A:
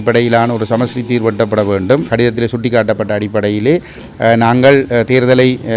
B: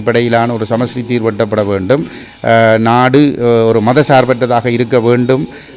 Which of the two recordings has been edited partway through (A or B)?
A